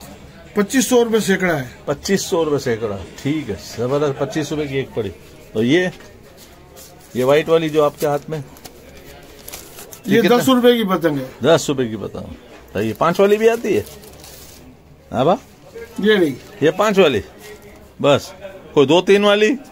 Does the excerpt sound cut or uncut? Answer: uncut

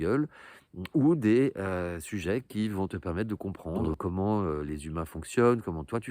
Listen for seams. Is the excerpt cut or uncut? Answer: cut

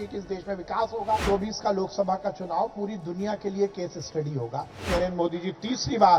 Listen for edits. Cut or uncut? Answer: cut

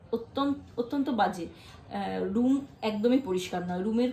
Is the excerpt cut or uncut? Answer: uncut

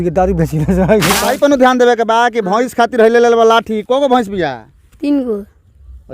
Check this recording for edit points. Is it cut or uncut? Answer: cut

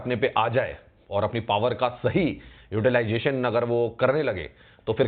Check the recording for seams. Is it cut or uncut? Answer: uncut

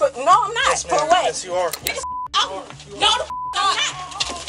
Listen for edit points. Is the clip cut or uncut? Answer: cut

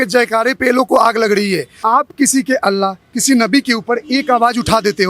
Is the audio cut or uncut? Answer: cut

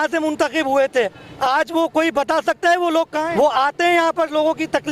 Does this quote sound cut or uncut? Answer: cut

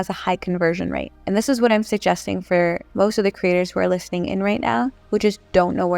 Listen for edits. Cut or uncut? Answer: cut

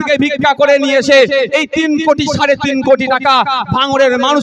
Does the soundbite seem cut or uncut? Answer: uncut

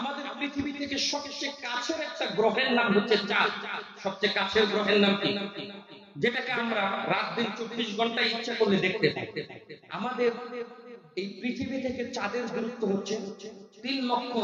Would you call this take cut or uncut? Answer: uncut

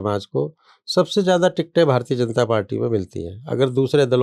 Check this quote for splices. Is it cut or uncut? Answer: uncut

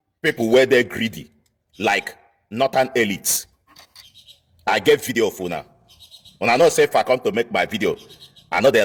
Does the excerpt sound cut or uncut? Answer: uncut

